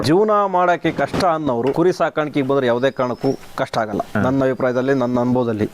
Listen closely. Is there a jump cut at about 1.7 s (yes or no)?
yes